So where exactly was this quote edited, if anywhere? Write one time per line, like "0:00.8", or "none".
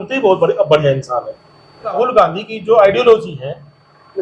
0:01.9